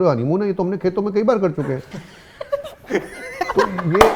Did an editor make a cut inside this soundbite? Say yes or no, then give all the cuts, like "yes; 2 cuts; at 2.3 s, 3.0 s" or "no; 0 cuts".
no; 0 cuts